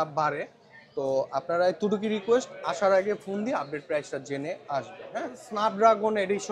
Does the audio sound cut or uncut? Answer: cut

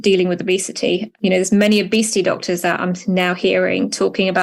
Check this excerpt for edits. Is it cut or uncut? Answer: uncut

